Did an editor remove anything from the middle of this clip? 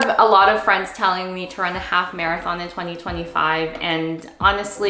no; 0 cuts

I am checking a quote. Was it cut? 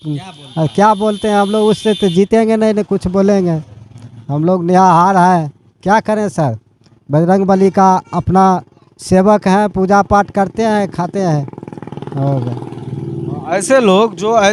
no; 0 cuts

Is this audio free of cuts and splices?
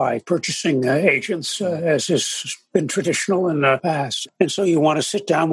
no; 1 cut; at 4.0 s

